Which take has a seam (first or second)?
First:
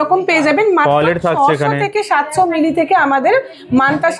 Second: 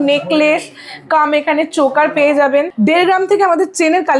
second